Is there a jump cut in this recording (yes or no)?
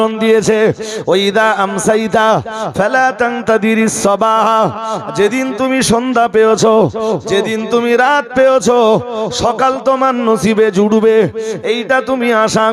no